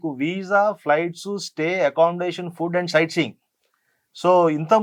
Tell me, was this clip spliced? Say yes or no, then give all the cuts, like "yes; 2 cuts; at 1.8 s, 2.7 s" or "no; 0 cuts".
no; 0 cuts